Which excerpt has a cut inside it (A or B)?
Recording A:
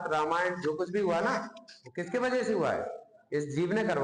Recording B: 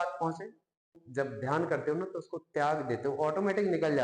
B